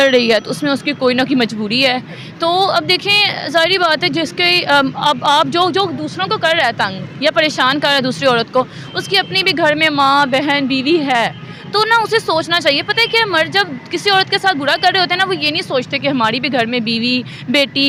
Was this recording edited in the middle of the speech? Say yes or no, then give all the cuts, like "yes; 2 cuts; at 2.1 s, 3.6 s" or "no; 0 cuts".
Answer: no; 0 cuts